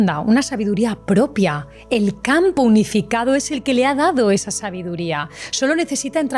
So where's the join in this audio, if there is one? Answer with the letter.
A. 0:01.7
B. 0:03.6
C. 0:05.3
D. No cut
A